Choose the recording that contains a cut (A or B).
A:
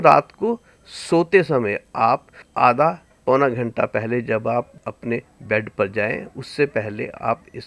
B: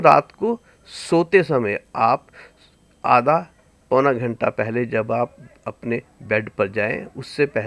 A